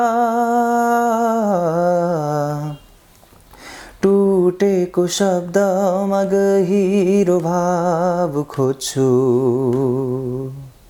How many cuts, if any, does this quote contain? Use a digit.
0